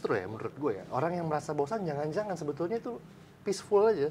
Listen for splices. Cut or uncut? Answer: uncut